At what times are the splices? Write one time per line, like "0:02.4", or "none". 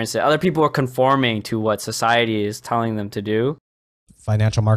0:03.8